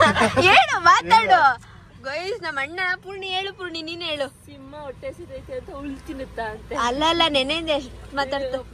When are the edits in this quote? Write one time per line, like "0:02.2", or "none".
none